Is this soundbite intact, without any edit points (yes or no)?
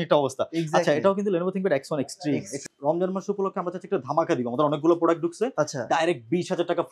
no